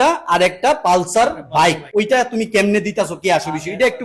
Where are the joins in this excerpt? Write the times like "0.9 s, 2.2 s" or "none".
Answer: 1.8 s